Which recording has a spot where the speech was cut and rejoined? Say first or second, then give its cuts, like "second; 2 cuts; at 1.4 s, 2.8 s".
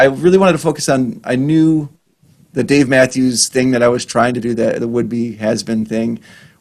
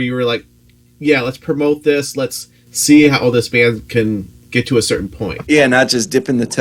second; 1 cut; at 5.4 s